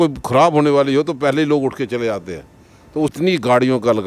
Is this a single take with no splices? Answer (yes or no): no